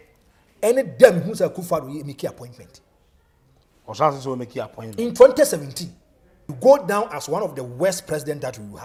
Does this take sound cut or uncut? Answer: uncut